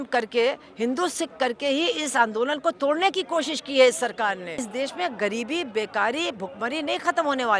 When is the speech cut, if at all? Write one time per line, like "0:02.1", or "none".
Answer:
0:04.6